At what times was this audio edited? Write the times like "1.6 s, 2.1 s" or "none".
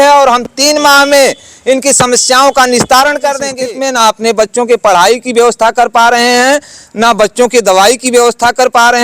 3.5 s